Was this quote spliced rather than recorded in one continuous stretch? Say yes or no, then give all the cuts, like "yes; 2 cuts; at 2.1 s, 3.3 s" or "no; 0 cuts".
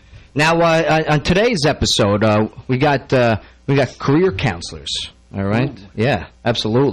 yes; 1 cut; at 4.8 s